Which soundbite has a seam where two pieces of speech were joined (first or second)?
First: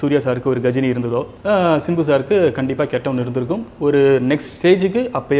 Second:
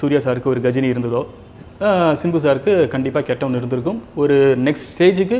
first